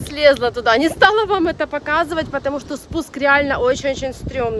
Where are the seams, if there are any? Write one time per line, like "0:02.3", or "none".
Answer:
none